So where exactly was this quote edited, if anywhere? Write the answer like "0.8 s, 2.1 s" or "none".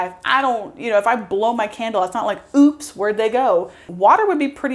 3.8 s